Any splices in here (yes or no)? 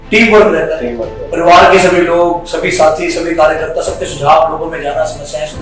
no